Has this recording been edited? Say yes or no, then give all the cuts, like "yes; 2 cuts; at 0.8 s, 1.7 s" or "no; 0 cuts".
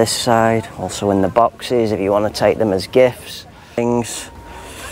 yes; 1 cut; at 3.8 s